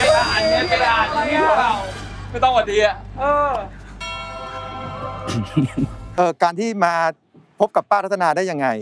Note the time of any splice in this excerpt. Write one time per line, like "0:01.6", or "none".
0:06.0